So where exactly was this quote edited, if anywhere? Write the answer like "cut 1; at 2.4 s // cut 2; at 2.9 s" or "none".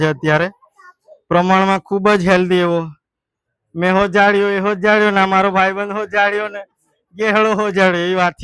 none